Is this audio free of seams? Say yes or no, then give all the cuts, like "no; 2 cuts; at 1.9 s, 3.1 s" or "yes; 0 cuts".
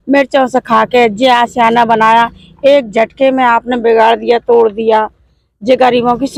yes; 0 cuts